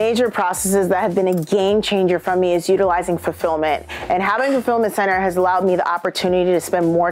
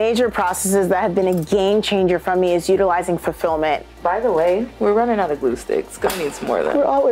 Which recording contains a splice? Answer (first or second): second